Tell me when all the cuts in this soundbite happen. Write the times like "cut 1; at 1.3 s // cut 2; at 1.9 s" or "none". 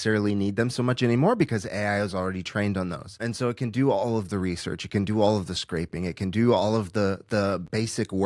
cut 1; at 3.2 s